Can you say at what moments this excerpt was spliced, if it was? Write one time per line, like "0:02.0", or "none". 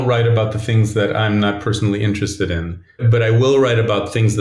0:03.0